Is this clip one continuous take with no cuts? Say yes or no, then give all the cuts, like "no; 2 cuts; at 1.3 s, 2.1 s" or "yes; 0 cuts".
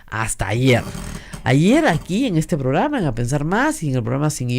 yes; 0 cuts